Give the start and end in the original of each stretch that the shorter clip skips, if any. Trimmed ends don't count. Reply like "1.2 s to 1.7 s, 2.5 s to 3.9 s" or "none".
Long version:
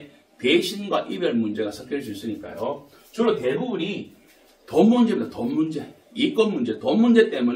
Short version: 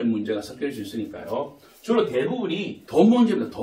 4.0 s to 4.5 s